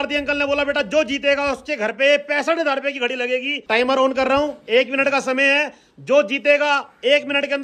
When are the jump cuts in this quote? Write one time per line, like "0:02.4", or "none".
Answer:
0:03.5

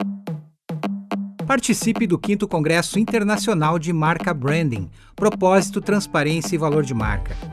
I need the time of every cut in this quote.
0:01.0

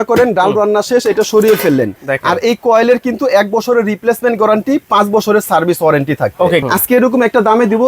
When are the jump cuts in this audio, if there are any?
0:02.0
0:06.6

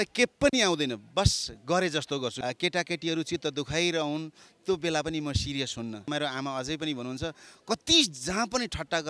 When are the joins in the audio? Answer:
0:02.4
0:06.1

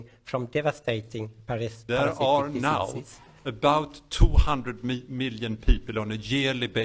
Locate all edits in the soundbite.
0:01.8

